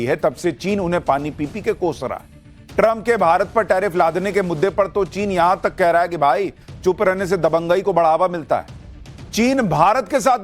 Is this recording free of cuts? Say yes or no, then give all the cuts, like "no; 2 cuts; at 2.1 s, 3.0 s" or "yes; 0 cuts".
no; 1 cut; at 1.3 s